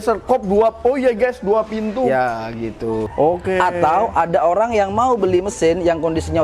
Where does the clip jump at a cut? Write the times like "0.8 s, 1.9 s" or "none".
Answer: 3.1 s